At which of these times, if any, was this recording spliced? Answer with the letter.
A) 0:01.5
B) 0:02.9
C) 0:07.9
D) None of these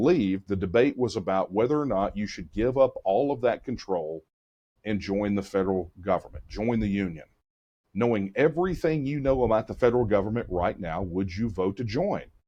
D